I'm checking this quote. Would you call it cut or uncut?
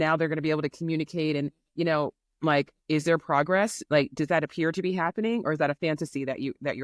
uncut